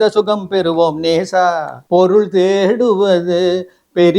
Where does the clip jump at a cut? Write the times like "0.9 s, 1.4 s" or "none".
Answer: 1.7 s